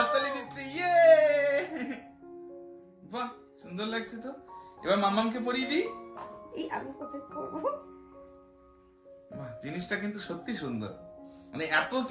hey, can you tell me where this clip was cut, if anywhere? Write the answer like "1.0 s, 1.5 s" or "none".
none